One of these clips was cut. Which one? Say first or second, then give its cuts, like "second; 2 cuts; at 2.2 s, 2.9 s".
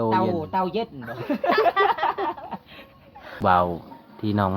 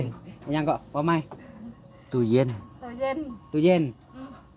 first; 1 cut; at 3.4 s